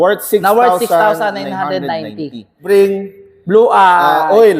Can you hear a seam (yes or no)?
yes